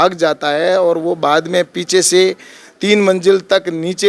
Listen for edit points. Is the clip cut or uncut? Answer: uncut